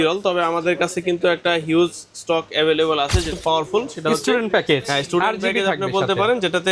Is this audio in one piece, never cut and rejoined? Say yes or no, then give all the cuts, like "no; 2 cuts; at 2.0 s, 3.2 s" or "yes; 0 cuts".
no; 1 cut; at 3.3 s